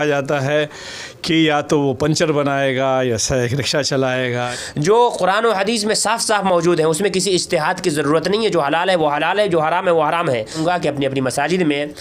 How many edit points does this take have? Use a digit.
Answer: 2